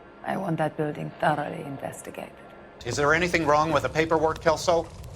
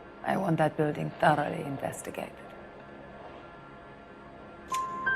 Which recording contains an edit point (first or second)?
first